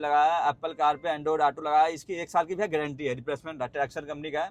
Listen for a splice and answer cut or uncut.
uncut